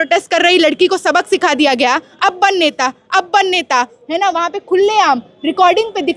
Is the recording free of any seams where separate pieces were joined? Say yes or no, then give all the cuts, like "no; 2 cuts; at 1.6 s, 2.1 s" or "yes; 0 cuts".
yes; 0 cuts